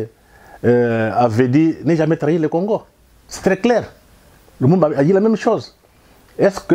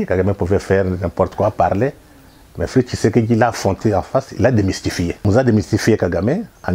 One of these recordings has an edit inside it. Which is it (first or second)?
second